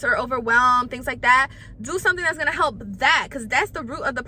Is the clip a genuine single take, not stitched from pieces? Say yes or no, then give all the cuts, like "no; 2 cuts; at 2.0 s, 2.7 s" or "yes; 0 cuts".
yes; 0 cuts